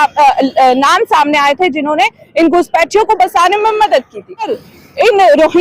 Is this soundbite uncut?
no; 1 cut; at 4.6 s

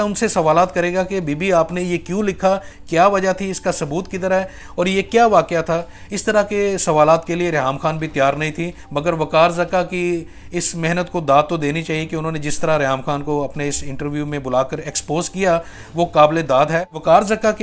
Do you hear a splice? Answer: no; 0 cuts

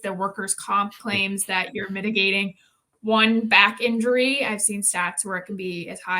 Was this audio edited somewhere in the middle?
no; 0 cuts

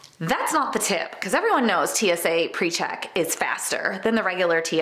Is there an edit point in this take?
no; 0 cuts

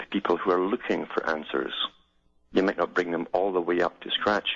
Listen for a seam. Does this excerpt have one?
yes; 1 cut; at 3.5 s

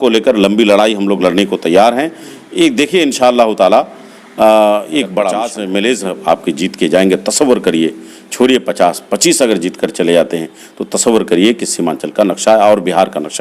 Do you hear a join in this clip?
yes; 1 cut; at 5.5 s

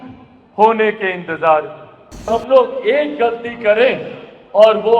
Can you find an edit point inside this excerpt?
yes; 1 cut; at 2.3 s

